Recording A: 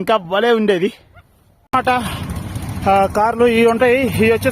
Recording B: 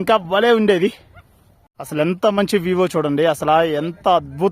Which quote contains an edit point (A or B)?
A